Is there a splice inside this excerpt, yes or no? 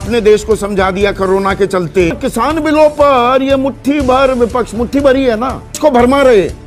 yes